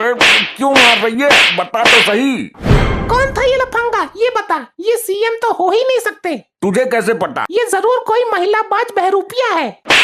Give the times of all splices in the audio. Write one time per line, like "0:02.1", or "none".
0:07.4